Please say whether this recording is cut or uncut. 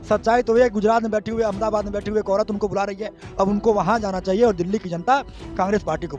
uncut